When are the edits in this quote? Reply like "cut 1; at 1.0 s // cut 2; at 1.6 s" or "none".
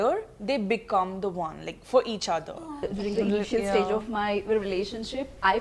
cut 1; at 2.9 s